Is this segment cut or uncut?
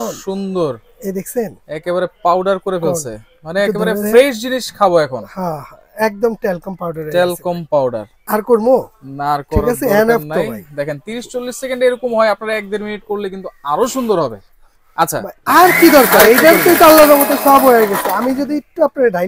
uncut